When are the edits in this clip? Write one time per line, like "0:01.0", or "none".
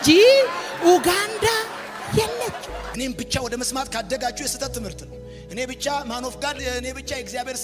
0:02.9